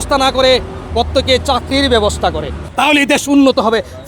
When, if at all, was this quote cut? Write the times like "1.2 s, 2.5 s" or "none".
2.6 s